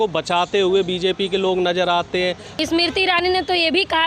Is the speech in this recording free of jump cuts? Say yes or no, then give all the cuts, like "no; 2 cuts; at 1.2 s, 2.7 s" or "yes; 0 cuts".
no; 1 cut; at 2.5 s